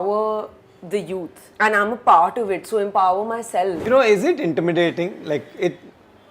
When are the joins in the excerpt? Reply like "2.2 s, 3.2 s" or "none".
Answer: 1.4 s, 3.8 s